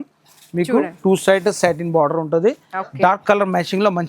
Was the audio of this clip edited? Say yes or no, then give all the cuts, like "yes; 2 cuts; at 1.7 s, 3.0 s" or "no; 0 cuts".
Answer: no; 0 cuts